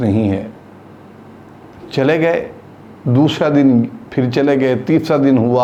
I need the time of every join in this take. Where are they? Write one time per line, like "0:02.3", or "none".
none